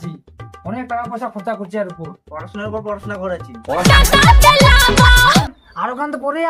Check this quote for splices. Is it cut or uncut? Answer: cut